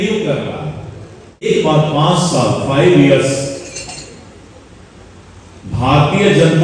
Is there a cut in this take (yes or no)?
yes